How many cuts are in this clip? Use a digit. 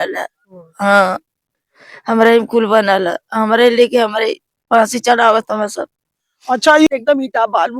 1